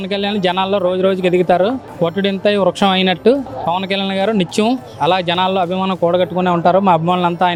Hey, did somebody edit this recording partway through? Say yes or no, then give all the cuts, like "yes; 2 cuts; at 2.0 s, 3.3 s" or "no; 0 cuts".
no; 0 cuts